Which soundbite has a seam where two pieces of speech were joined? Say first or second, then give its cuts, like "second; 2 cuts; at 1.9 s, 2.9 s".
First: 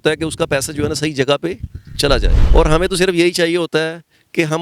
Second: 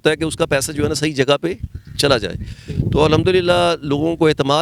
first; 1 cut; at 2.4 s